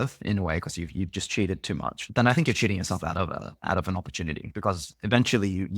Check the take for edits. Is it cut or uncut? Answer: cut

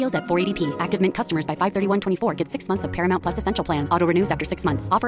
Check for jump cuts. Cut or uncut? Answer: uncut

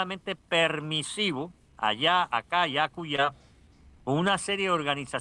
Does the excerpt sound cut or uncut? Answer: uncut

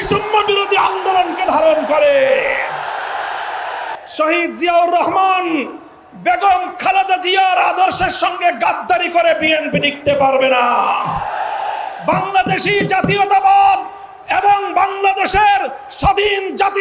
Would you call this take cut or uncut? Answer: cut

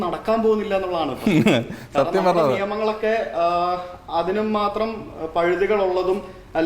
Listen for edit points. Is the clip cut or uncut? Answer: uncut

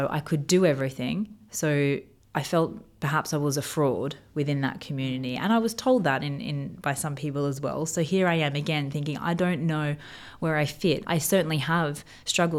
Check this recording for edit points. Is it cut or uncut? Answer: cut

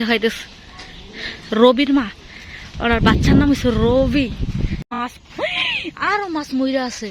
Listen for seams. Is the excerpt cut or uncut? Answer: cut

